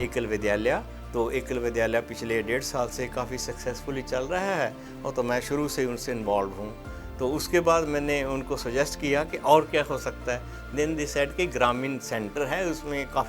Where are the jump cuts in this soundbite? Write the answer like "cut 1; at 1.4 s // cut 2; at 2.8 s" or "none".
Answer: cut 1; at 1.0 s